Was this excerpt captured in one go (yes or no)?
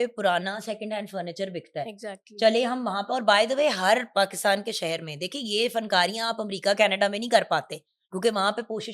yes